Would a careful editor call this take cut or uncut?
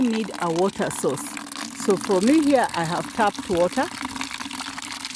uncut